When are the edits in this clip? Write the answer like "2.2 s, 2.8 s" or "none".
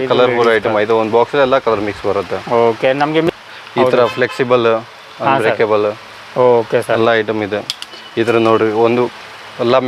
3.3 s